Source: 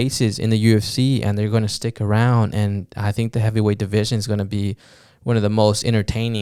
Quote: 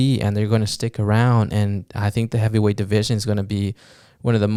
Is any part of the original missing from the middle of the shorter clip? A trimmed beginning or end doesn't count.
no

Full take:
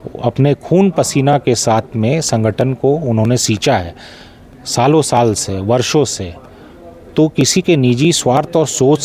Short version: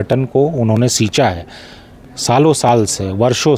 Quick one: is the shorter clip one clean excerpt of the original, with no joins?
yes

